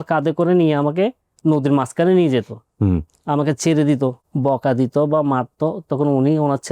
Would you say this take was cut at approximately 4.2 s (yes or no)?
yes